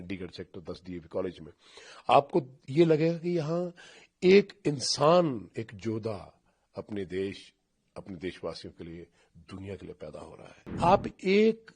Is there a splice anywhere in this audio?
yes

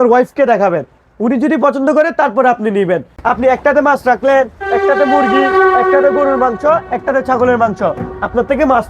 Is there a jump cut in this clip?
yes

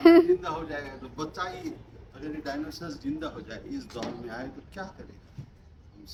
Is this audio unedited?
yes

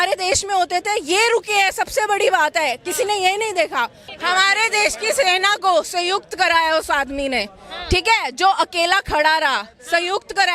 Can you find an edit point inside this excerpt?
no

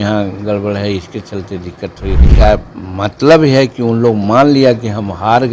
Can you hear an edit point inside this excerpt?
yes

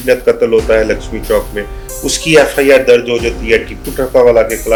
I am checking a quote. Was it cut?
no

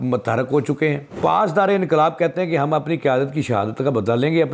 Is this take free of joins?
no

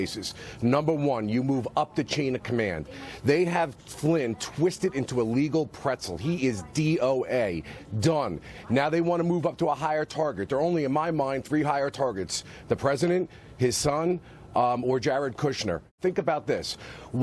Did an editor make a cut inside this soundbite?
yes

